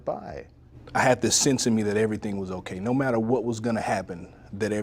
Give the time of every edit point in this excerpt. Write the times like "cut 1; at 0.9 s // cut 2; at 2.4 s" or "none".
none